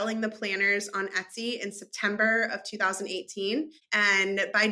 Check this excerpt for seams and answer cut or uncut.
cut